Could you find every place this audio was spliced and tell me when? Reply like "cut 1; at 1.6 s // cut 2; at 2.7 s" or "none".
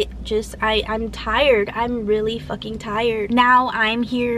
cut 1; at 3.3 s